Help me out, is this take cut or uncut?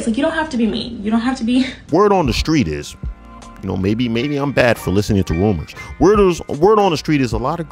cut